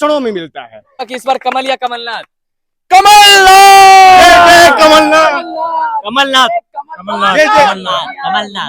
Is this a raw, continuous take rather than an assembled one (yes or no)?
no